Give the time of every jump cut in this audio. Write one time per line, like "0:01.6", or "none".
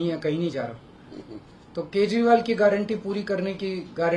none